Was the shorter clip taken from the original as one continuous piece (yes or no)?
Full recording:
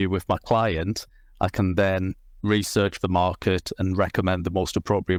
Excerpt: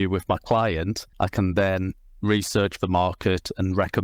no